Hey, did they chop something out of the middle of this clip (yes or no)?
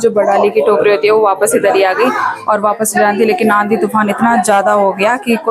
no